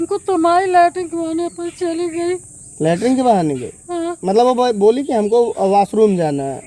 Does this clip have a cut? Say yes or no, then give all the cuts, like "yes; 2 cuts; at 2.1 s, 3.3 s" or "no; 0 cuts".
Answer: no; 0 cuts